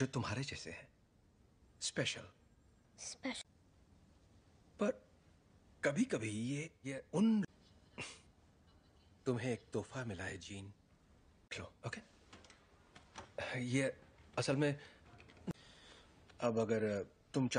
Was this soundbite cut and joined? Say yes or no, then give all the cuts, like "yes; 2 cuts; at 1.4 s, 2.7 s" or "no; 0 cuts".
no; 0 cuts